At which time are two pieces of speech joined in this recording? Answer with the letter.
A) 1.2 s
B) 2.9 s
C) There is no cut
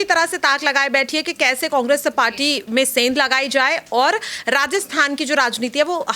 C